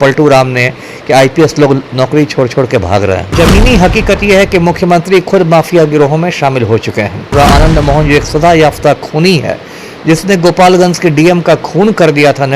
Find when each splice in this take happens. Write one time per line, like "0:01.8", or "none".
0:03.3
0:07.3